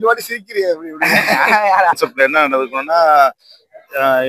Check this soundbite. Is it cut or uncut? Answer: cut